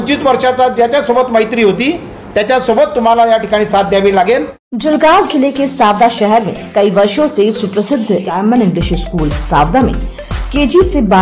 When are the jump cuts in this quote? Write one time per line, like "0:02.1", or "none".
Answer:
0:04.6
0:08.3